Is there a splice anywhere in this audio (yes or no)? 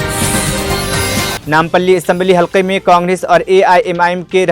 yes